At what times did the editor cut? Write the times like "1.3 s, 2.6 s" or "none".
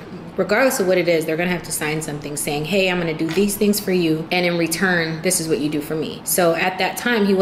3.2 s, 4.2 s, 6.2 s